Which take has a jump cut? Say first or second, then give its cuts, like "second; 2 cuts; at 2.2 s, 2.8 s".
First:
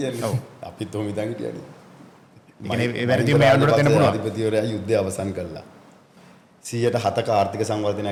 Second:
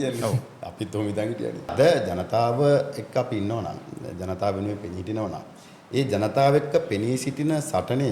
second; 1 cut; at 1.7 s